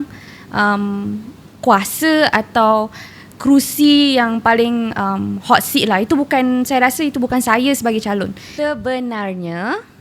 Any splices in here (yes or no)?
yes